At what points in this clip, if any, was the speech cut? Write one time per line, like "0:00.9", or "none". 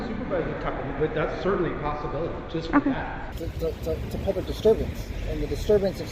0:03.3